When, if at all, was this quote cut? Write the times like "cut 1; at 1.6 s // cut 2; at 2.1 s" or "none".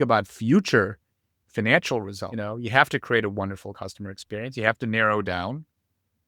cut 1; at 2.2 s